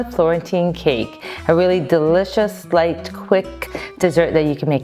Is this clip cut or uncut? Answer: uncut